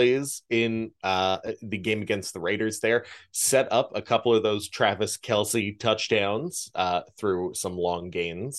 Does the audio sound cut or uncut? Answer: uncut